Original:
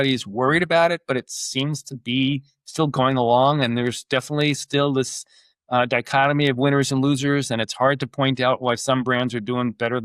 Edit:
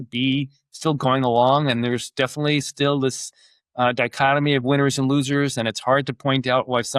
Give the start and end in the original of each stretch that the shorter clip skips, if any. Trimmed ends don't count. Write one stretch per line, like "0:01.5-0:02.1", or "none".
none